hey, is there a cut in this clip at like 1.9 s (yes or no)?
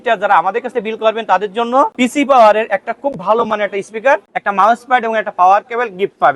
yes